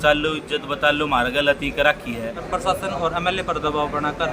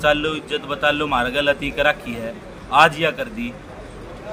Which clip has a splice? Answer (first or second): first